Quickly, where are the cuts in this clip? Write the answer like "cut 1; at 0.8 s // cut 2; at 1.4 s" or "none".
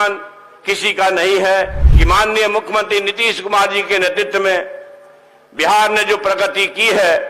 cut 1; at 1.8 s